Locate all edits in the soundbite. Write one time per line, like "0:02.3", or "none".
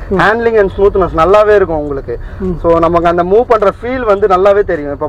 none